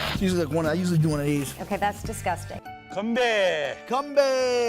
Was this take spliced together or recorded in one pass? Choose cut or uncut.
cut